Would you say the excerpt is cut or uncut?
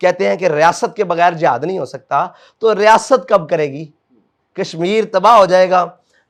uncut